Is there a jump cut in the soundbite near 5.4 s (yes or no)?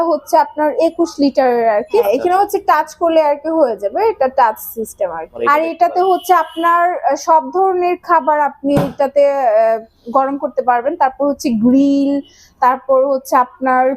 yes